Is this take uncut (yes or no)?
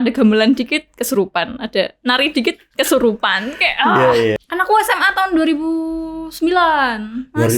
no